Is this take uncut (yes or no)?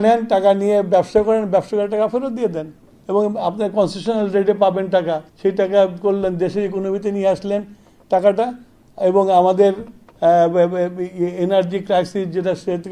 yes